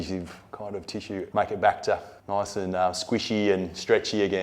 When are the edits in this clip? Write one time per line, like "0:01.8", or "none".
0:01.3
0:02.1